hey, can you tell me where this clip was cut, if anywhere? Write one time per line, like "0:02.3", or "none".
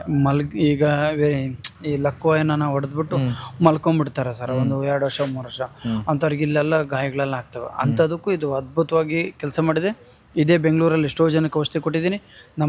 none